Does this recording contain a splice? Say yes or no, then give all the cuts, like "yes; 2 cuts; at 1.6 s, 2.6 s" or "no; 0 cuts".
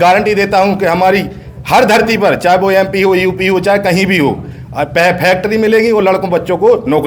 no; 0 cuts